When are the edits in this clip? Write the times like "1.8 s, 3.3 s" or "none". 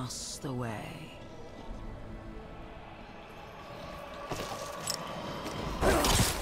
3.2 s